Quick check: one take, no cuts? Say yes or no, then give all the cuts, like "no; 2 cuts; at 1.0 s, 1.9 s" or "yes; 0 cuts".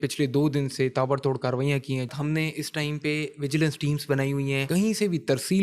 no; 2 cuts; at 2.1 s, 4.6 s